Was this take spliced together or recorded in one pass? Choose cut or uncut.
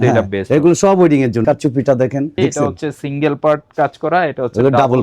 cut